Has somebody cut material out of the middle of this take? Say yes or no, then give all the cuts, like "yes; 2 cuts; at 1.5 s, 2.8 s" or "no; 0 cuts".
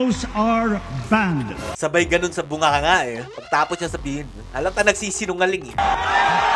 yes; 1 cut; at 1.8 s